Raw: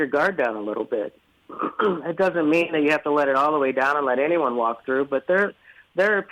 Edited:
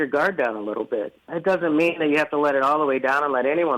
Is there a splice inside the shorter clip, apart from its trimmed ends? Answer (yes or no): yes